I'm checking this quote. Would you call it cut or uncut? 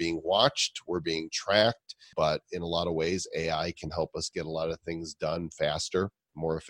cut